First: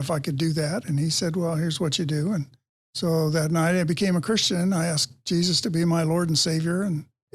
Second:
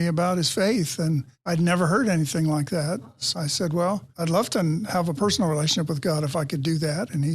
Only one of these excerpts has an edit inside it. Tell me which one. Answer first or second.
second